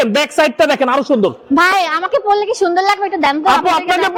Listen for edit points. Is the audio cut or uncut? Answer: uncut